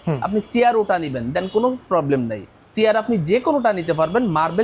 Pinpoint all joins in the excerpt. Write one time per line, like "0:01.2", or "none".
none